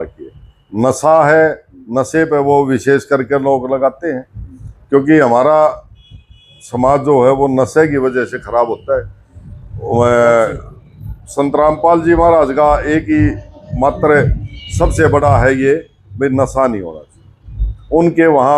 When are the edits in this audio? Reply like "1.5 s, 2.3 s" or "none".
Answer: none